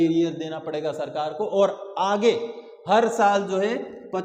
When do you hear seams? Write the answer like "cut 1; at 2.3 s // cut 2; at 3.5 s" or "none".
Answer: none